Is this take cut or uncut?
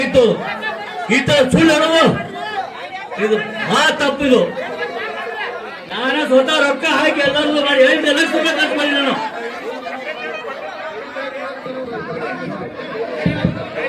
uncut